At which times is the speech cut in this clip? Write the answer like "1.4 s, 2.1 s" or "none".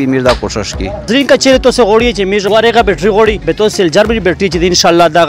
1.1 s, 2.5 s, 3.4 s